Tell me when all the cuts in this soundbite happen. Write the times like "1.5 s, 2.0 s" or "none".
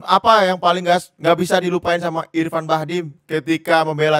none